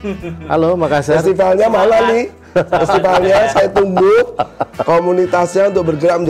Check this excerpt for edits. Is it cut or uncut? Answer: uncut